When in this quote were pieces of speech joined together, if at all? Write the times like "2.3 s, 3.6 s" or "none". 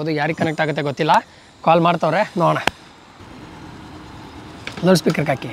3.2 s